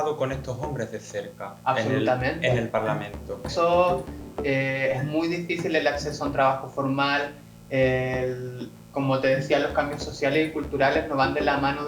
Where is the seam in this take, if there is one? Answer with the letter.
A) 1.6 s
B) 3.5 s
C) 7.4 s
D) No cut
B